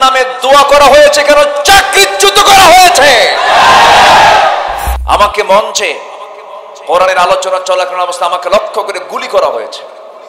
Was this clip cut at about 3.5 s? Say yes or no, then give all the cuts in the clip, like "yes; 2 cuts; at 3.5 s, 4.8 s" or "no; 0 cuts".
no; 1 cut; at 4.9 s